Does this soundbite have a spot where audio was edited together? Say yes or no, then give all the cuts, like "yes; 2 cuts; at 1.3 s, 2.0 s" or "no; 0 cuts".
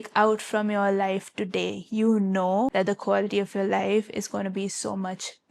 no; 0 cuts